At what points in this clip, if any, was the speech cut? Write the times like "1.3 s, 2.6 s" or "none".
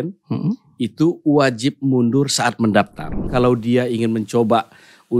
3.1 s